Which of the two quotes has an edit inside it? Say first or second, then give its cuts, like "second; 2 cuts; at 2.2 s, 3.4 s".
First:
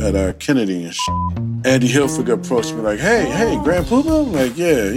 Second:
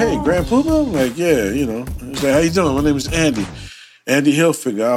first; 1 cut; at 1.1 s